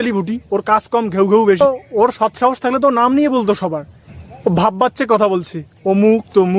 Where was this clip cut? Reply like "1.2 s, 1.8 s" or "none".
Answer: none

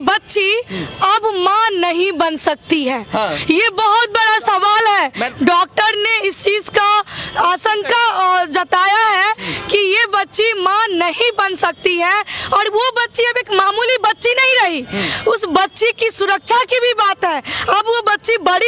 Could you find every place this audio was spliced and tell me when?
none

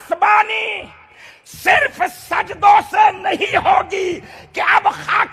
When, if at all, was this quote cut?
none

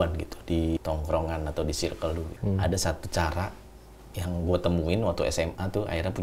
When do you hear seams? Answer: 0.8 s, 2.3 s

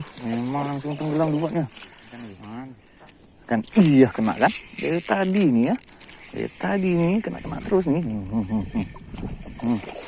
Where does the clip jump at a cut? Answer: 2.8 s

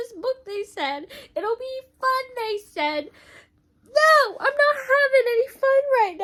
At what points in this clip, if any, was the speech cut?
none

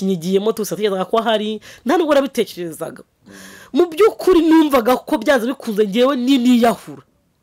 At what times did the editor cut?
none

